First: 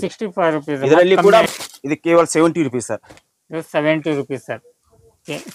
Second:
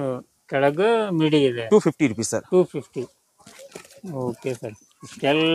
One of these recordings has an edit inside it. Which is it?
first; 1 cut; at 1.5 s

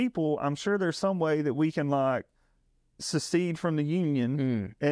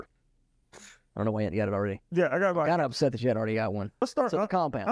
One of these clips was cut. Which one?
second; 1 cut; at 4.0 s

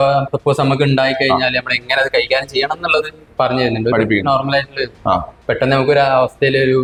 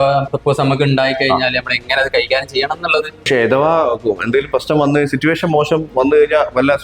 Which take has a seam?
second; 1 cut; at 3.3 s

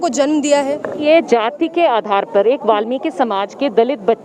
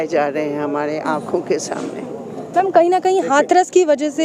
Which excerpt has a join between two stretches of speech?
first; 1 cut; at 1.0 s

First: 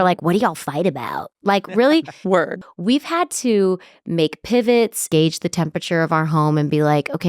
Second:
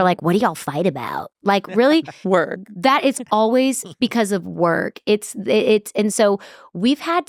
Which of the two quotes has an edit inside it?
first; 2 cuts; at 2.6 s, 5.0 s

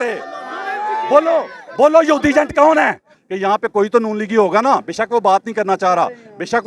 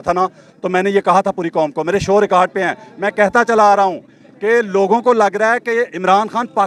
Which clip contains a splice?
first; 1 cut; at 3.1 s

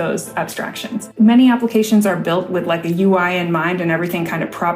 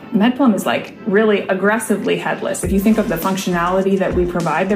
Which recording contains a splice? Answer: first; 1 cut; at 1.1 s

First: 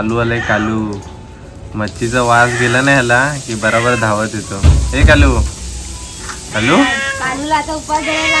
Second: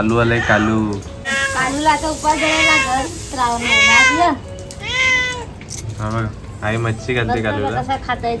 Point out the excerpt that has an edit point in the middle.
second; 1 cut; at 1.4 s

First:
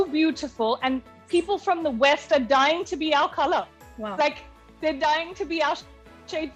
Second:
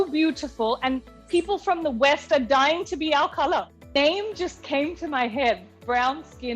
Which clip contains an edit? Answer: second; 1 cut; at 4.0 s

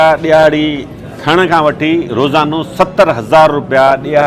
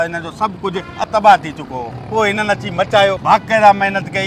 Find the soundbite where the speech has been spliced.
second; 2 cuts; at 1.9 s, 3.2 s

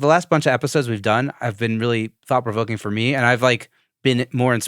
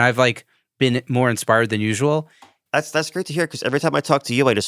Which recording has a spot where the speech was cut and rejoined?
second; 1 cut; at 2.6 s

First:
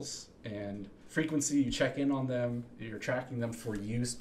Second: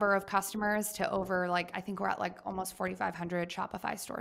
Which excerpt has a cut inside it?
first; 1 cut; at 1.0 s

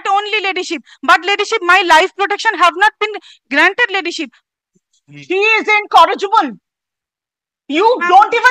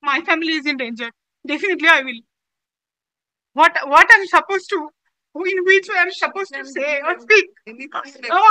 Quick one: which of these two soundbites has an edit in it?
first; 1 cut; at 4.4 s

